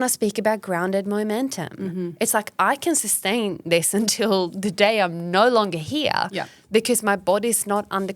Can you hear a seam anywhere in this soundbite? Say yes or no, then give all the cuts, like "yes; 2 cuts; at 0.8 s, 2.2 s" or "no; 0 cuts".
no; 0 cuts